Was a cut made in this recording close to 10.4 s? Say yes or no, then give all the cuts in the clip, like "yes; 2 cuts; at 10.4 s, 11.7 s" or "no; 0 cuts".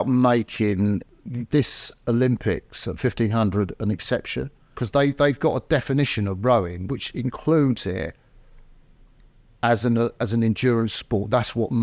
no; 3 cuts; at 1.1 s, 4.8 s, 6.9 s